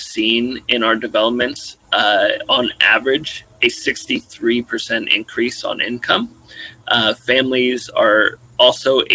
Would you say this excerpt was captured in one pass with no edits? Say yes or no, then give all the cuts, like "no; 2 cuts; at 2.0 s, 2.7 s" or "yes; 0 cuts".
yes; 0 cuts